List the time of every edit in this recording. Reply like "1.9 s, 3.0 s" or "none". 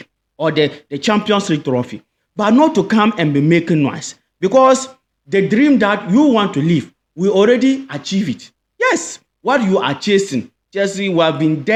none

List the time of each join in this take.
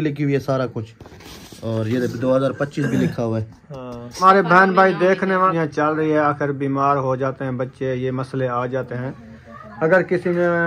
4.2 s, 5.5 s

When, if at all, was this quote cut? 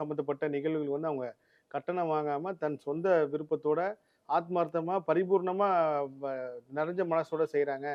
none

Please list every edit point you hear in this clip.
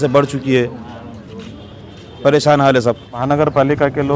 3.2 s

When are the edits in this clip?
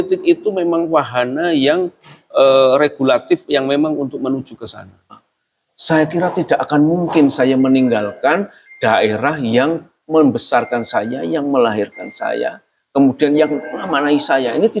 5.2 s

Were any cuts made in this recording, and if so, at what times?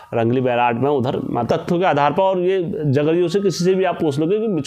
1.4 s

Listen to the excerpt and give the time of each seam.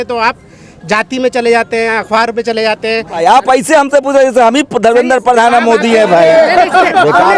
3.2 s

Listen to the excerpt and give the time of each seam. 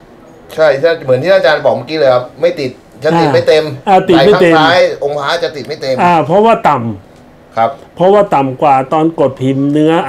none

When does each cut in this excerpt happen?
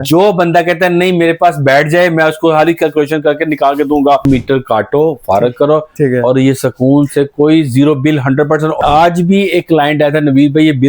4.2 s, 8.8 s

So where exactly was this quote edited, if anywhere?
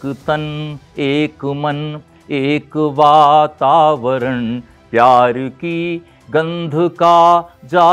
none

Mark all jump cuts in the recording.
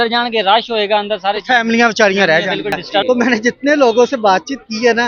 3.0 s

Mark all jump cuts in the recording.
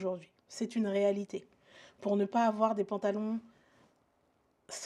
none

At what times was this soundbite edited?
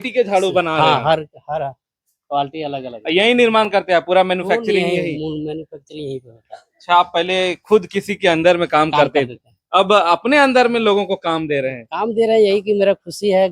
none

